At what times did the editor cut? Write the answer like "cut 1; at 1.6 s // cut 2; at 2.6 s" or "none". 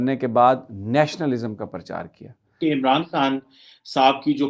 cut 1; at 2.5 s